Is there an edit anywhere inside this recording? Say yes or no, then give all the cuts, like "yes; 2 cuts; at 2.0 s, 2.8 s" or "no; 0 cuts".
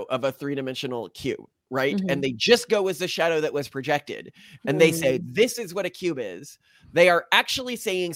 no; 0 cuts